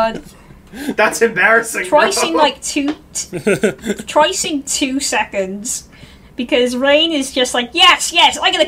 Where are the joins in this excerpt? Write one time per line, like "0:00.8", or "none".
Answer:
none